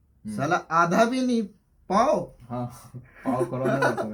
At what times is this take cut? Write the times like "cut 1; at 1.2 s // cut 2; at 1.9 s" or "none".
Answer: none